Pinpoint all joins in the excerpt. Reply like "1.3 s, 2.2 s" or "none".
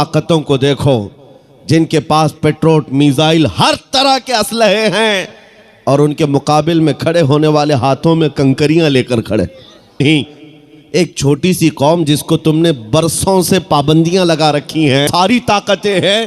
10.0 s, 15.1 s

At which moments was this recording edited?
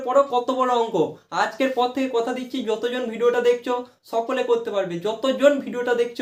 none

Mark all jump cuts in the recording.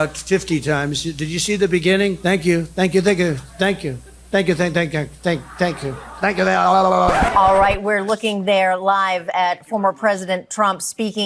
2.2 s, 7.2 s

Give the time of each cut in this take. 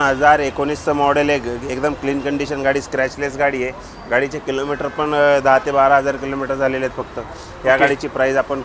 none

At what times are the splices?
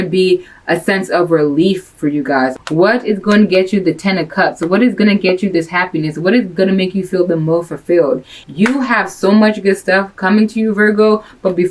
2.6 s, 8.3 s

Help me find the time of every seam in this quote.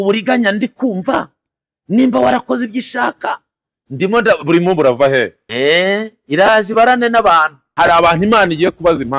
5.4 s

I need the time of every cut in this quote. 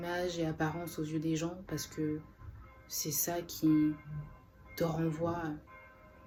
none

